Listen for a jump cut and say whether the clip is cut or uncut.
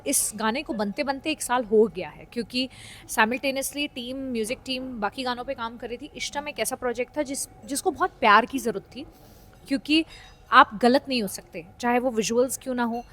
uncut